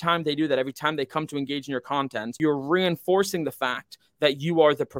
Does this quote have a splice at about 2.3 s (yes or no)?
yes